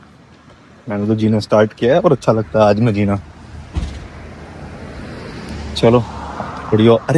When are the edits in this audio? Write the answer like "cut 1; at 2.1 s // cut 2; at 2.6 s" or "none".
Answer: none